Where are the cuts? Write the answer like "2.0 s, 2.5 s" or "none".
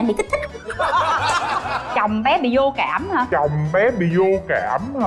1.9 s

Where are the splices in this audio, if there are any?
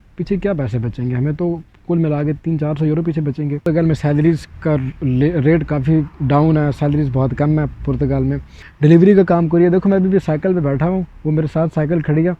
3.6 s, 8.6 s

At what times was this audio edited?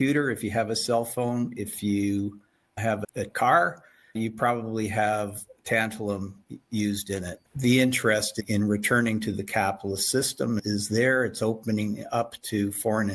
3.2 s, 7.5 s

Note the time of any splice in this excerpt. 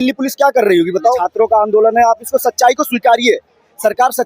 1.3 s

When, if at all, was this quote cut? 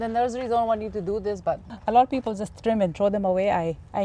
1.7 s

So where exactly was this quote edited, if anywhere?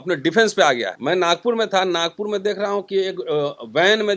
0.9 s

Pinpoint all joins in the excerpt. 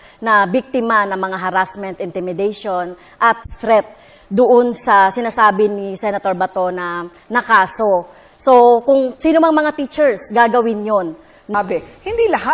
11.5 s

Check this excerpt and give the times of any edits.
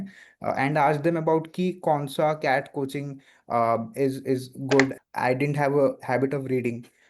5.0 s

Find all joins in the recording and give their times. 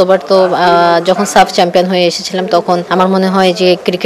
2.9 s

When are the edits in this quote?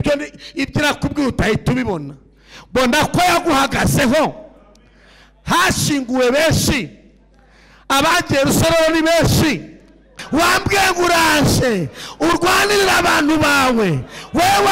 10.2 s

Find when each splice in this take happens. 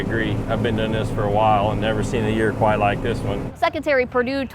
3.5 s

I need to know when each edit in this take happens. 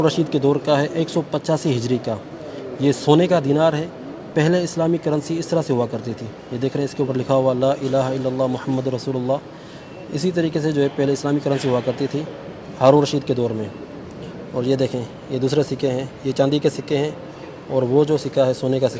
none

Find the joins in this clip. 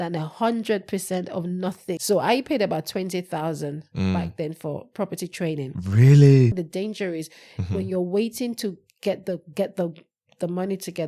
2.0 s, 6.6 s

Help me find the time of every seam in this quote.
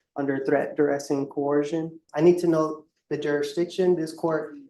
2.0 s

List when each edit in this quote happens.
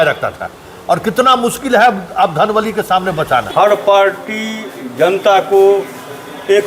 3.5 s

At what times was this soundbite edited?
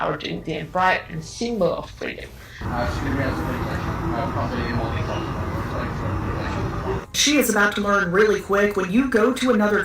2.5 s, 7.2 s

